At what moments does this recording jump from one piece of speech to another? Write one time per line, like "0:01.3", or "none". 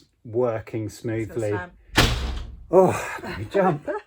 0:03.1